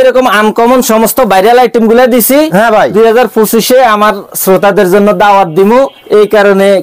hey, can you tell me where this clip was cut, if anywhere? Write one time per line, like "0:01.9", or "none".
none